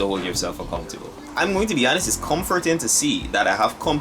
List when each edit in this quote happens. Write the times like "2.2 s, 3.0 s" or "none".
1.2 s